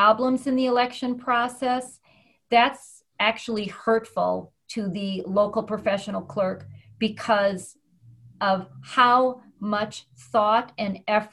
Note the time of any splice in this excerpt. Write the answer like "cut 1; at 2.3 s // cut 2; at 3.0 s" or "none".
none

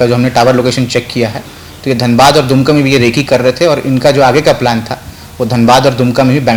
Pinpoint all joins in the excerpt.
none

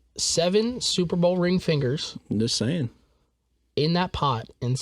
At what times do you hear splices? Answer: none

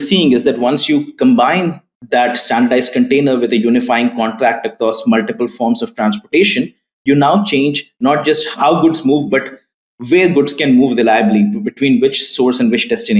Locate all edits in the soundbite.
none

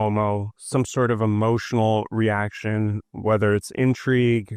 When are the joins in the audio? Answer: none

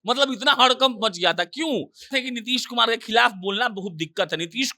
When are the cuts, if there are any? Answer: cut 1; at 2.1 s

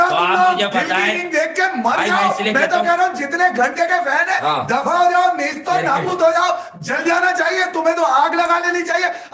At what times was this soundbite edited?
none

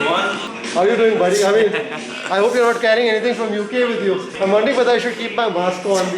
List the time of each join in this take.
cut 1; at 4.3 s

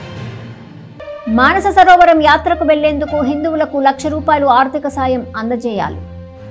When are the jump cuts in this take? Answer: cut 1; at 0.9 s

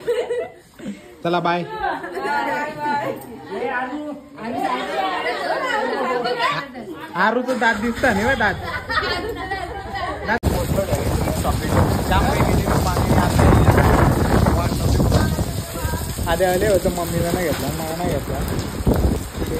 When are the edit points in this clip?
cut 1; at 10.4 s

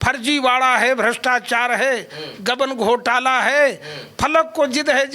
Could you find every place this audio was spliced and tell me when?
none

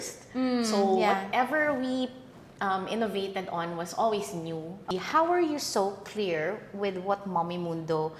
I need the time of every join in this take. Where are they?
cut 1; at 4.9 s

